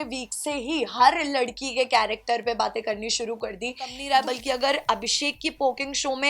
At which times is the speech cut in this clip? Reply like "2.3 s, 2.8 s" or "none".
4.0 s